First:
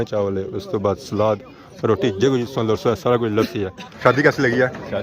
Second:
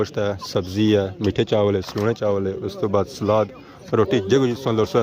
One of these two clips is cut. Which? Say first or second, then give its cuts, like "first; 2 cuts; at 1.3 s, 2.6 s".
first; 1 cut; at 3.9 s